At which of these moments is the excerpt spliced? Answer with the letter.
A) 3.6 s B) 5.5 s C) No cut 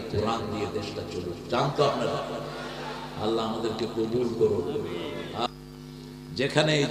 B